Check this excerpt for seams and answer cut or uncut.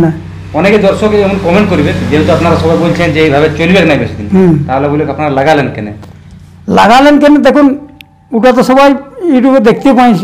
uncut